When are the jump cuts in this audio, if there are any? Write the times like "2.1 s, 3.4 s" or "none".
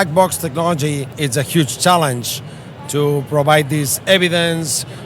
1.1 s